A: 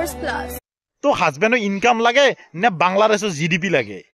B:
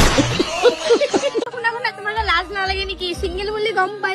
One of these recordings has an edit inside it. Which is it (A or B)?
B